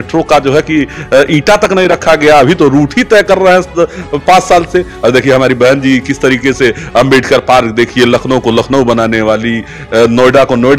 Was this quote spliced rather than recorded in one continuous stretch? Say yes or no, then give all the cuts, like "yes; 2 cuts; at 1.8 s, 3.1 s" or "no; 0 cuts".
no; 0 cuts